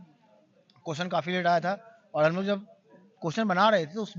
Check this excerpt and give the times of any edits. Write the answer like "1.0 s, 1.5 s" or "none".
none